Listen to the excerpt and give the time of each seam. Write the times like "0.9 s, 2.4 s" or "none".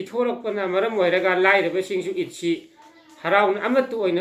none